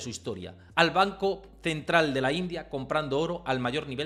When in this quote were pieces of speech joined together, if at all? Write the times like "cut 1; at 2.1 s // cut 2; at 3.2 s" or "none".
none